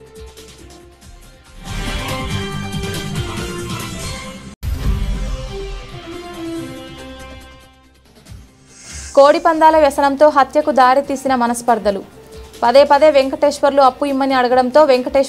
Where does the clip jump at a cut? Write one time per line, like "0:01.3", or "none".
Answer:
0:02.2
0:04.5
0:09.1